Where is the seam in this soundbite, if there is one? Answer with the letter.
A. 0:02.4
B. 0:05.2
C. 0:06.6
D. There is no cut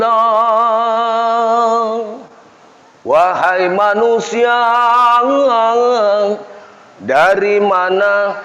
D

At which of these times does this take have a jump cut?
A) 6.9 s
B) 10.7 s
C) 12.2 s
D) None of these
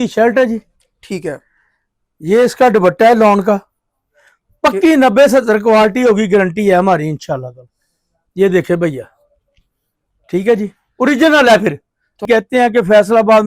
C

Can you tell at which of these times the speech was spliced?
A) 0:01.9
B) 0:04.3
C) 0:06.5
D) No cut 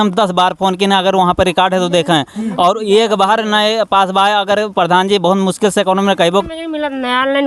C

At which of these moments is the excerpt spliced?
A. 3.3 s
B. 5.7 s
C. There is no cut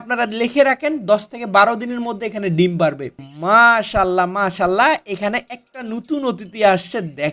A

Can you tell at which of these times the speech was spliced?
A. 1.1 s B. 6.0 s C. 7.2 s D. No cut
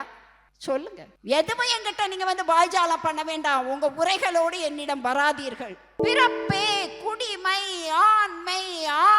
B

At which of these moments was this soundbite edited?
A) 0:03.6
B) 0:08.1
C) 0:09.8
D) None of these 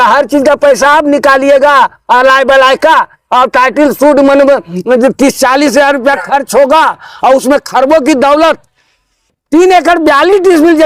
D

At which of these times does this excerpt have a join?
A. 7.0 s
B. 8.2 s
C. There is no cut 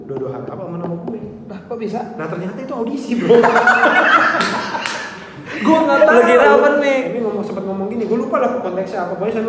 A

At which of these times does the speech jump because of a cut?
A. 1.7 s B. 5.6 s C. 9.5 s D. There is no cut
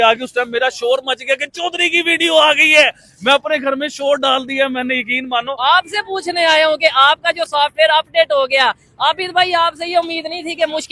B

